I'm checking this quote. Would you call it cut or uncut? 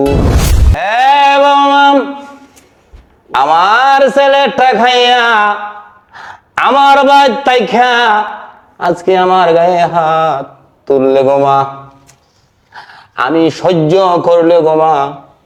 uncut